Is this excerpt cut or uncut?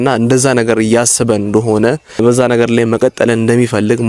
cut